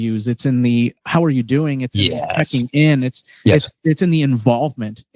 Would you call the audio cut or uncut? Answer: uncut